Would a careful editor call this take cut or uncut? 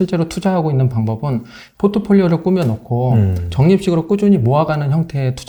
uncut